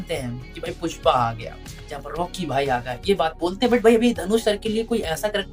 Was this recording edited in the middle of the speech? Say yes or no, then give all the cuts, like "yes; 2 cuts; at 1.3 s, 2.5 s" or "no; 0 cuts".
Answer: no; 0 cuts